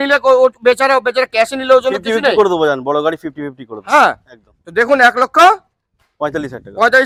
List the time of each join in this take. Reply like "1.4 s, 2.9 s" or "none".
none